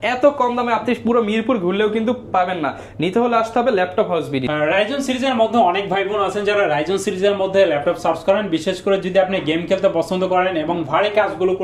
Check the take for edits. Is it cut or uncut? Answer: uncut